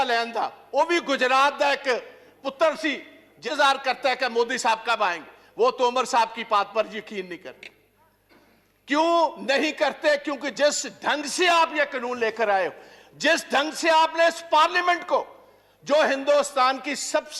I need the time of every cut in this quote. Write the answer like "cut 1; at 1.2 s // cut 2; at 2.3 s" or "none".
cut 1; at 3.4 s